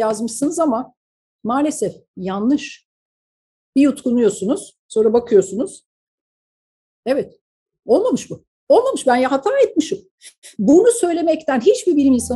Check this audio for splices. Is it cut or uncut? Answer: uncut